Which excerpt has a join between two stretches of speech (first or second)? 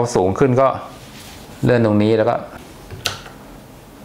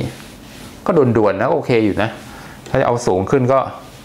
first